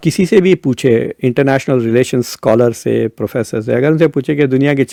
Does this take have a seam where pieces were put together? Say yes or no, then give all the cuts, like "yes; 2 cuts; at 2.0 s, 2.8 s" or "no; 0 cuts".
no; 0 cuts